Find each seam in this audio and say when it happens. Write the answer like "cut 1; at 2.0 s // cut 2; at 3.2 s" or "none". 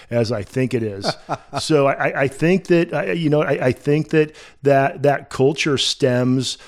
none